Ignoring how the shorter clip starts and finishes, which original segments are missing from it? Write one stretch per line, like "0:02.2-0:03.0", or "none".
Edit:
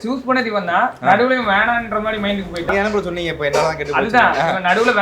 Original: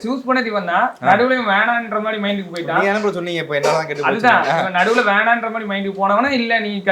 0:02.7-0:02.8